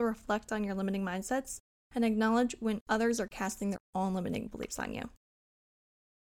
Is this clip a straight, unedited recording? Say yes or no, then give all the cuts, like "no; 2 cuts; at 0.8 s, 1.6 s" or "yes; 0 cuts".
yes; 0 cuts